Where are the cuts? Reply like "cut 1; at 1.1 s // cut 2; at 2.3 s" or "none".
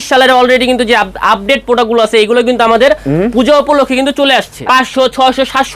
cut 1; at 4.5 s